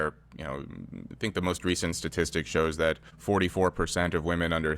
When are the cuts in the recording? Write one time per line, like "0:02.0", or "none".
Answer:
0:03.1